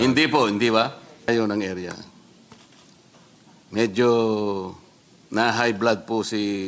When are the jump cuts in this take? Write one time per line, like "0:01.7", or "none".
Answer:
0:01.3